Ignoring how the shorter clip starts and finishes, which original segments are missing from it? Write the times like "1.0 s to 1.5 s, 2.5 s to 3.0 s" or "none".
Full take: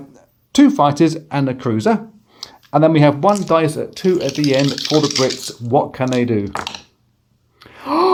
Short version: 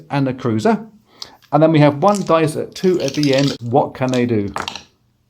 4.8 s to 5.6 s

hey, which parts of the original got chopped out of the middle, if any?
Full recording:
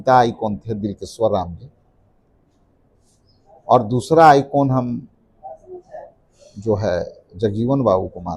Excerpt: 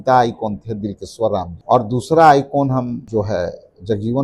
1.5 s to 3.5 s, 5.0 s to 6.6 s

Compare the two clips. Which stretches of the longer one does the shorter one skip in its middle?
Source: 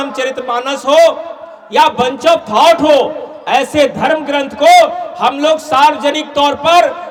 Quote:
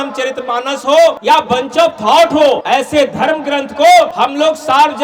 1.2 s to 1.7 s, 3.1 s to 3.4 s, 4.9 s to 5.2 s

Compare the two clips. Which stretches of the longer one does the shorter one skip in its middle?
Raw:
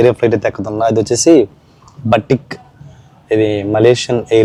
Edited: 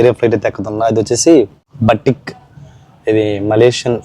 1.6 s to 1.9 s

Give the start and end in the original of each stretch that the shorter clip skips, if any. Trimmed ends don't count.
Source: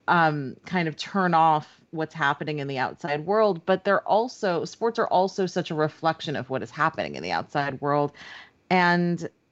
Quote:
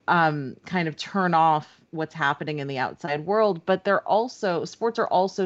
none

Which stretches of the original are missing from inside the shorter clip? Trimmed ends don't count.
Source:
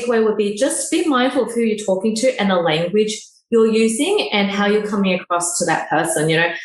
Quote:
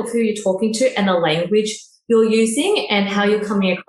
none

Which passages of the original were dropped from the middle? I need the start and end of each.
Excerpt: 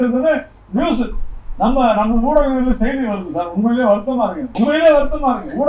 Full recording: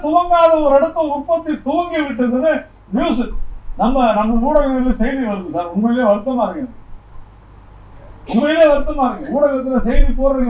6.6 s to 8.2 s

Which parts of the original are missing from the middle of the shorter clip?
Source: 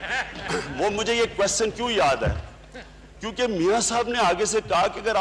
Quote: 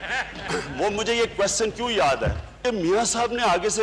2.5 s to 3.2 s

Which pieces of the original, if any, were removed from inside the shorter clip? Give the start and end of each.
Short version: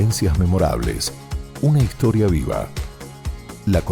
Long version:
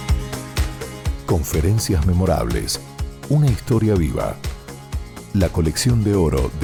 none

